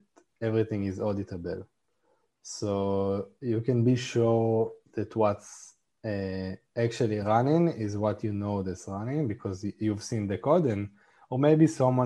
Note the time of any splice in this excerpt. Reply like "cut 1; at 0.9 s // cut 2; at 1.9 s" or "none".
none